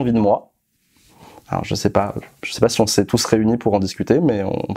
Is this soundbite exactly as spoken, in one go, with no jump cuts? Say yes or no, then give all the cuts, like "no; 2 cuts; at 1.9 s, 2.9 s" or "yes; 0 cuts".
yes; 0 cuts